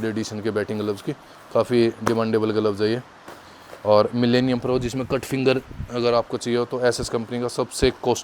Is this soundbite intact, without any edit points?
yes; 0 cuts

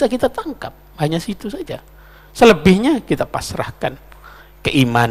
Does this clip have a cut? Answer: no; 0 cuts

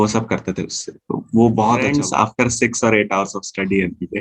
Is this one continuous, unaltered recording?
no; 1 cut; at 1.9 s

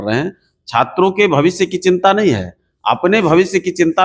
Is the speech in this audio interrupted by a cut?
no; 0 cuts

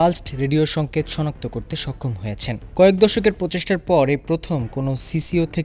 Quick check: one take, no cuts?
yes; 0 cuts

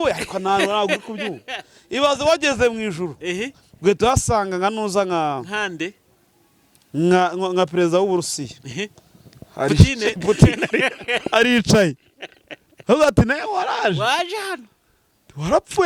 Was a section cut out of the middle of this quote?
no; 0 cuts

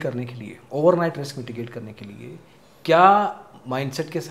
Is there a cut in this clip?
no; 0 cuts

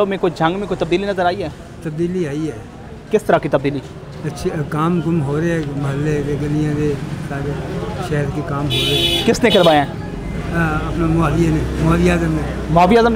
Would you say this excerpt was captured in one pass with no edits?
yes; 0 cuts

